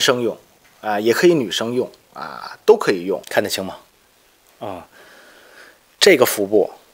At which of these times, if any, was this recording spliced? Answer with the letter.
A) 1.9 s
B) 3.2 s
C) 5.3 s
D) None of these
B